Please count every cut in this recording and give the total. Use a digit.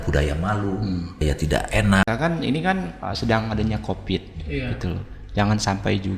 1